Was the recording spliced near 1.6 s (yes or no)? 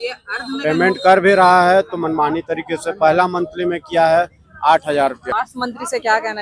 no